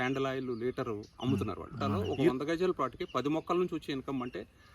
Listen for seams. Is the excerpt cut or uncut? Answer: cut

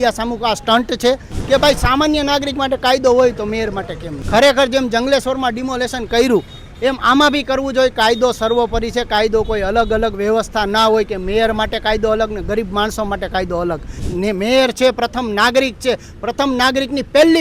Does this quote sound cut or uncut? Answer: cut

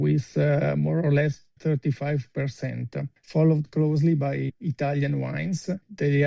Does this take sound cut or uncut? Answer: cut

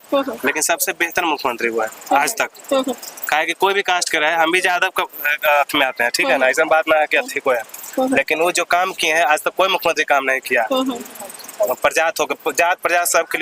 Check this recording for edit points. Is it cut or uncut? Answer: uncut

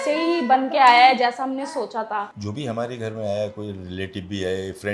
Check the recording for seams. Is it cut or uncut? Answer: cut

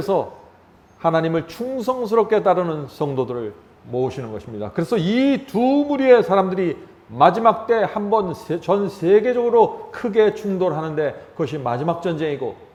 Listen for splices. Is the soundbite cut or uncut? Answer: uncut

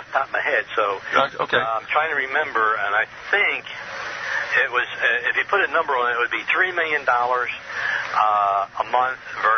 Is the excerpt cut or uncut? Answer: cut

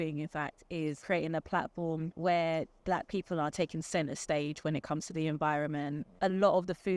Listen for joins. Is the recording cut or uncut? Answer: cut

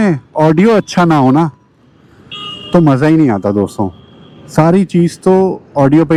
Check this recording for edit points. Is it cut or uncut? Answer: uncut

